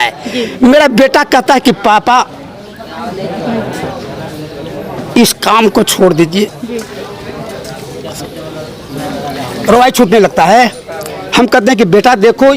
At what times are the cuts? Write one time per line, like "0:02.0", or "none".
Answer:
none